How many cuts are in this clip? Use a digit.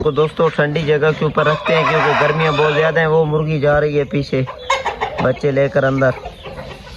0